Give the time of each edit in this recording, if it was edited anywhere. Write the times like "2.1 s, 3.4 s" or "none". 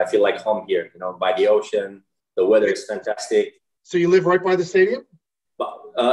none